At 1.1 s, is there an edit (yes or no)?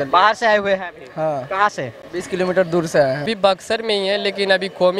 no